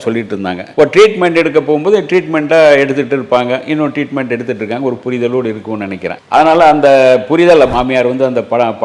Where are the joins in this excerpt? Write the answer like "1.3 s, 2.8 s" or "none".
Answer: 7.7 s